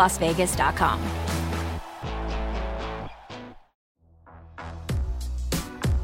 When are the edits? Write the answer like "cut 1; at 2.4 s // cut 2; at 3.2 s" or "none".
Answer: cut 1; at 3.8 s